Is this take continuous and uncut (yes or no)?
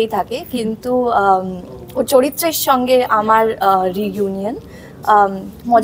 yes